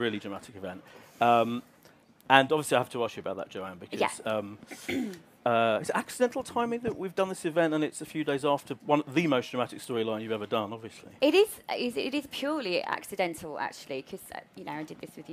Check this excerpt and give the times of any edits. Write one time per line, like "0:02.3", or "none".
0:07.3